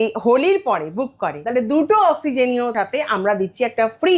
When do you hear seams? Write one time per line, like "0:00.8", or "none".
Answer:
0:01.3
0:02.7

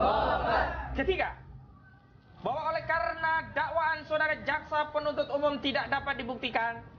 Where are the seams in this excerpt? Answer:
none

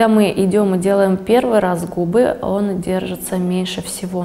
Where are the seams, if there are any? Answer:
none

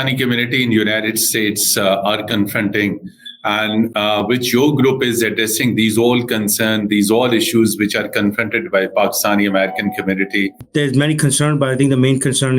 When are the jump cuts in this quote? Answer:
0:10.6

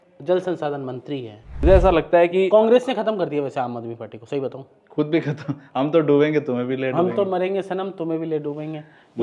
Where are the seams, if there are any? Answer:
0:01.6

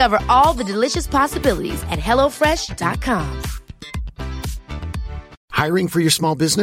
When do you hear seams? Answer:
0:05.4

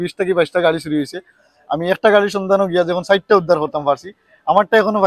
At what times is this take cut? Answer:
none

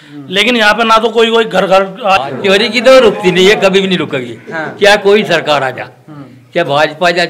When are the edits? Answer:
0:02.2

